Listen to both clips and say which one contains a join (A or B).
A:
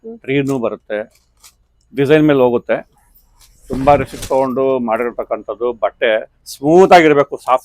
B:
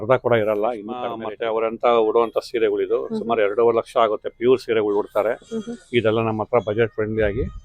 B